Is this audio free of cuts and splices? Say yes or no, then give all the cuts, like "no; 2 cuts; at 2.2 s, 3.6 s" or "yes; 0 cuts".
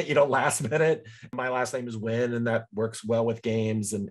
no; 1 cut; at 1.2 s